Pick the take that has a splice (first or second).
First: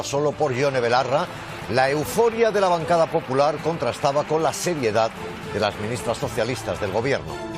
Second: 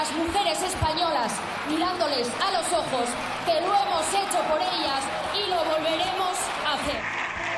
first